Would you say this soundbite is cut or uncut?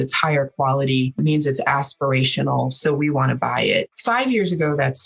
cut